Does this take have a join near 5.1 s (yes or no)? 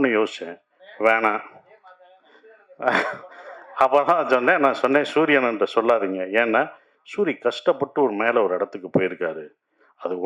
no